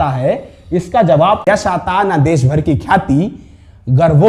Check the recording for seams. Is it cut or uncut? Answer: cut